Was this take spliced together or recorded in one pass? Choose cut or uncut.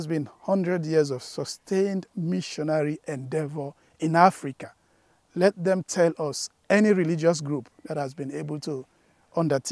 uncut